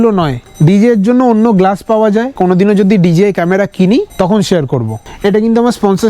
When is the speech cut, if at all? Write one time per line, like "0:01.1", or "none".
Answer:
0:02.3
0:05.0